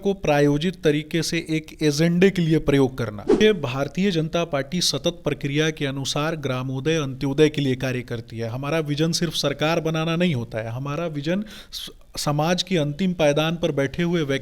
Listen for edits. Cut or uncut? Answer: cut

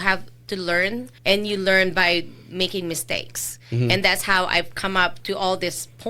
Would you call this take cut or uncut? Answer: cut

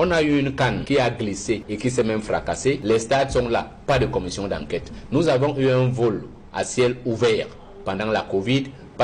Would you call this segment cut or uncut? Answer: uncut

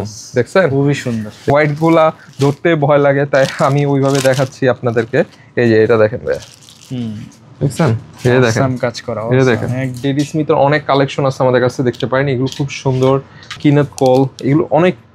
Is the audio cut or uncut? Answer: cut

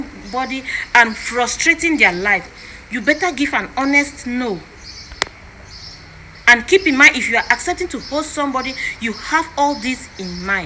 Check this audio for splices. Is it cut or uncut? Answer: uncut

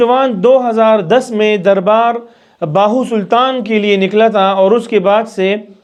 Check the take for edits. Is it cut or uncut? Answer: uncut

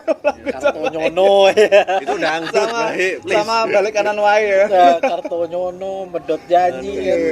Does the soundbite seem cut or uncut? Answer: uncut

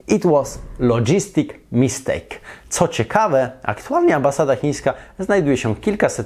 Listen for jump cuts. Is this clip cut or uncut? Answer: uncut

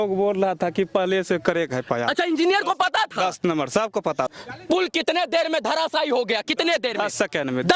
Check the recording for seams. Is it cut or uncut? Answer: cut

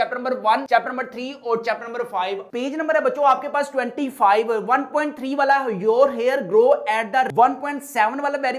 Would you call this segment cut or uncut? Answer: cut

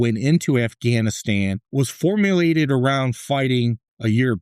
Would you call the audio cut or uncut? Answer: cut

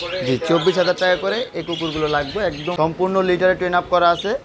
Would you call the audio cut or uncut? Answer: cut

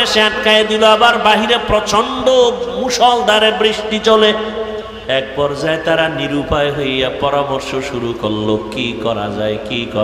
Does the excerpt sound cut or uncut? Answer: cut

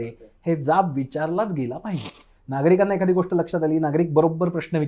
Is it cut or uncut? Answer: cut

